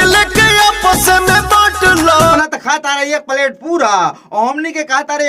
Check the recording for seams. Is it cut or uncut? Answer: cut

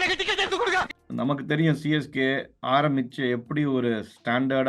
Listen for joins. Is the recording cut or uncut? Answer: cut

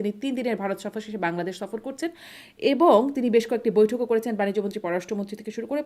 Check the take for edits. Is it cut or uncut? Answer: uncut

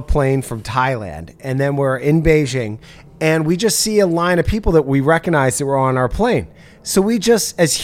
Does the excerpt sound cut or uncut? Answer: uncut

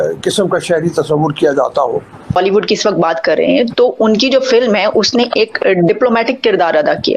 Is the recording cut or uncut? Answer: cut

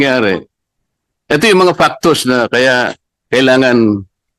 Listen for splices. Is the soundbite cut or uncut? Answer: uncut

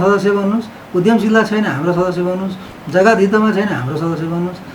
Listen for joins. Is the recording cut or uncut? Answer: uncut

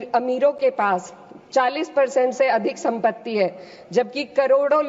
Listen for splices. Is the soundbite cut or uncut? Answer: uncut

